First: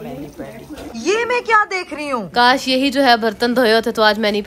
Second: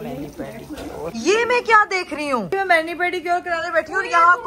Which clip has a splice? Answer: first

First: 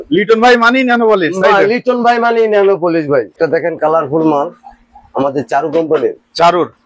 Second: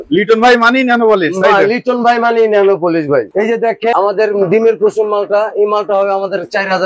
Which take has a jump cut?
first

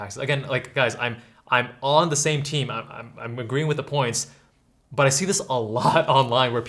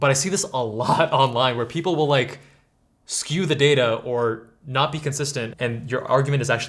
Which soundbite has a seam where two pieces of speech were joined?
second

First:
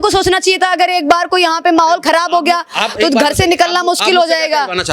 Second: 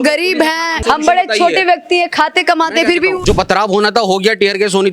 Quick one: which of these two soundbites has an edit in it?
second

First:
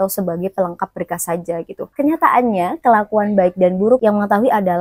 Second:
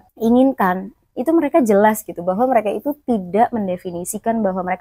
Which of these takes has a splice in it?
first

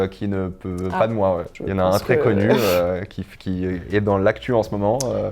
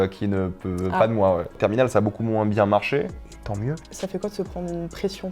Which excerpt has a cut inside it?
second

